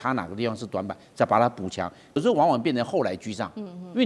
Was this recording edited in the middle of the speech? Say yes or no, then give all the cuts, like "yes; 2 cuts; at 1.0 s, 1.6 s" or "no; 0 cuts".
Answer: yes; 1 cut; at 2.2 s